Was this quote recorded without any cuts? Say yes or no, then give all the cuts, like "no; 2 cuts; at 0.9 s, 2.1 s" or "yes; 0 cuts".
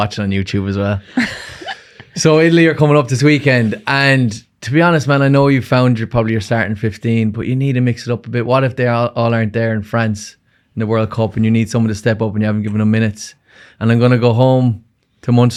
yes; 0 cuts